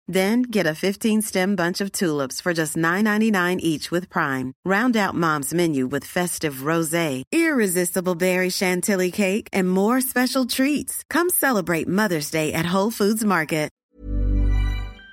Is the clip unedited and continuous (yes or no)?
no